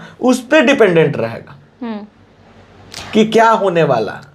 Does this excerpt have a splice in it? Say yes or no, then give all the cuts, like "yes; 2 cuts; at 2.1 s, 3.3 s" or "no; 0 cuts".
no; 0 cuts